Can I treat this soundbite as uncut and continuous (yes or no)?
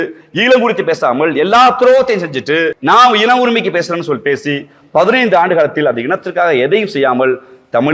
no